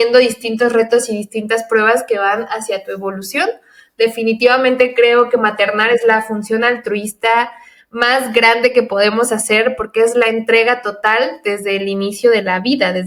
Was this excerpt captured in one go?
yes; 0 cuts

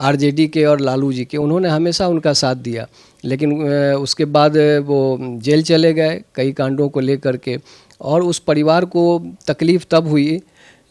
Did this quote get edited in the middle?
no; 0 cuts

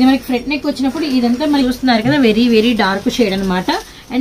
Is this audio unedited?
no; 1 cut; at 1.6 s

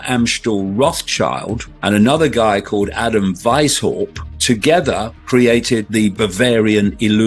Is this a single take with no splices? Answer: no; 3 cuts; at 1.7 s, 4.3 s, 5.9 s

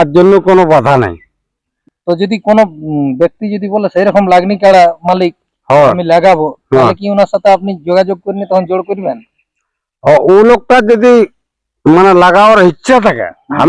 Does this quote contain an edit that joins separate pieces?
no; 0 cuts

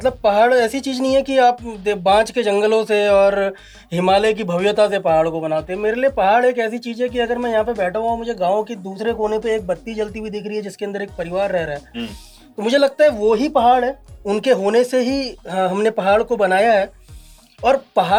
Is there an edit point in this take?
no; 0 cuts

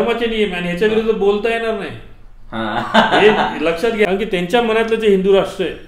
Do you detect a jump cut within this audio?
yes; 1 cut; at 4.0 s

